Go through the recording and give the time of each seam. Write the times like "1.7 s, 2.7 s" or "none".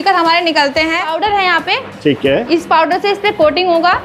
1.1 s